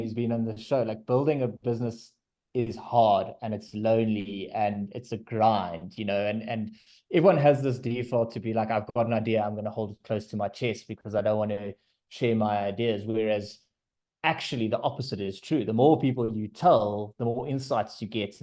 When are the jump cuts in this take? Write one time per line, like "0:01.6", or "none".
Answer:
none